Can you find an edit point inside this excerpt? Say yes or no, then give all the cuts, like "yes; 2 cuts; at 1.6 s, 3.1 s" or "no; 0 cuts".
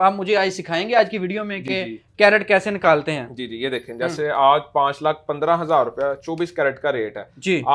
no; 0 cuts